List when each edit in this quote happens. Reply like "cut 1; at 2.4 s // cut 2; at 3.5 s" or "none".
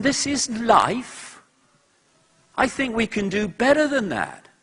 none